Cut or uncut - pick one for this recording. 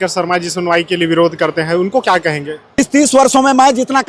cut